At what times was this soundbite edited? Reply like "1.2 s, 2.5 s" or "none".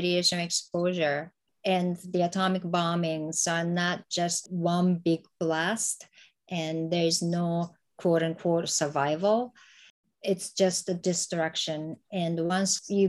4.4 s

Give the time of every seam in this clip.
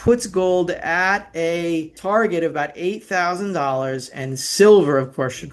1.9 s

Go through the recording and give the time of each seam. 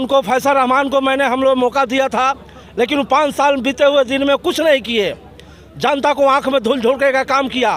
none

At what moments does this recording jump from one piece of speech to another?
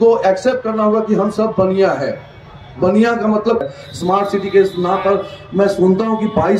3.6 s

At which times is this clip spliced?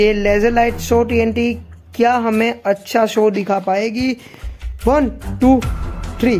none

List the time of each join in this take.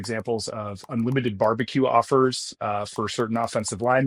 none

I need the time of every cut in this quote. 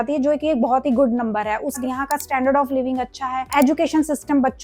1.8 s

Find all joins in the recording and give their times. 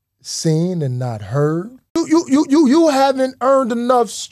1.9 s

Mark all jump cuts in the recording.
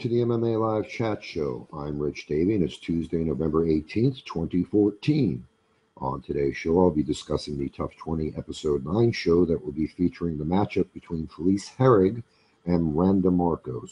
10.8 s

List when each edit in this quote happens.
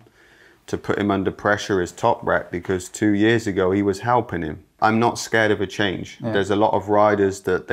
4.7 s

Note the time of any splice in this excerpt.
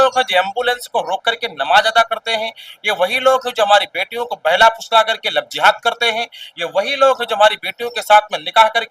none

